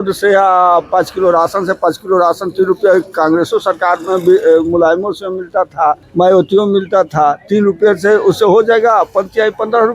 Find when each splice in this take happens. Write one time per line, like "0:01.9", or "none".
0:06.0

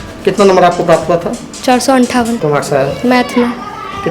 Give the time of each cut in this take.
0:02.4

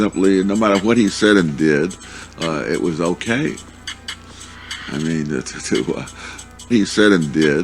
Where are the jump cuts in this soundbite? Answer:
0:06.7

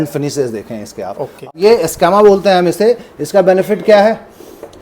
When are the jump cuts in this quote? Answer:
0:01.5

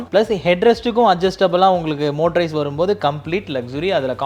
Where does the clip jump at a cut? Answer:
none

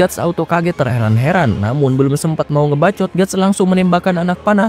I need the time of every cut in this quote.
none

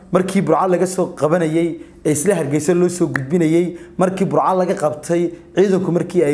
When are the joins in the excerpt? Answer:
none

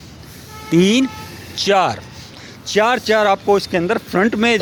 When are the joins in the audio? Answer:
none

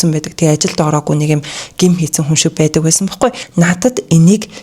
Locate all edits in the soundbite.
0:03.4

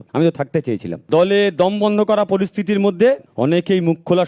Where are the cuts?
0:00.9
0:03.3

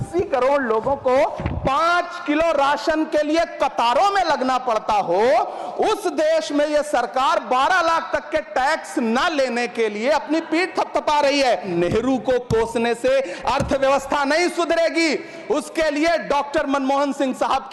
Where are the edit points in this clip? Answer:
0:11.7

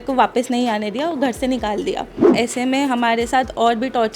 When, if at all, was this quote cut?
0:02.2

